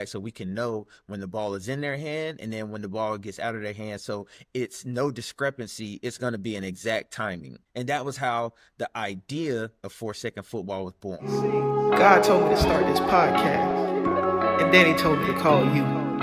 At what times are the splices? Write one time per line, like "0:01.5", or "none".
0:11.3